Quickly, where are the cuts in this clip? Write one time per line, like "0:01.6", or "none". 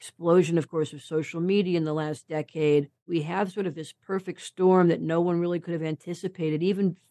0:03.1